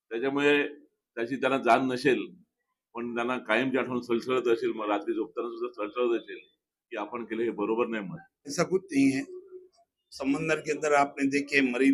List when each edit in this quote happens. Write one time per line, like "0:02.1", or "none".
0:08.5